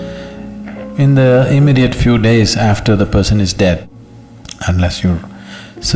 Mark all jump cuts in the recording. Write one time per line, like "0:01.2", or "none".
0:03.8